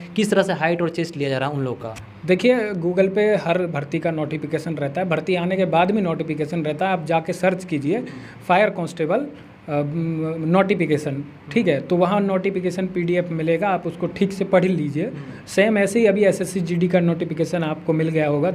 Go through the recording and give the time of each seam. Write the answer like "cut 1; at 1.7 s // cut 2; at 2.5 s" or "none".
none